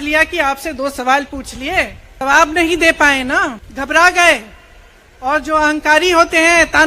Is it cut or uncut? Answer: cut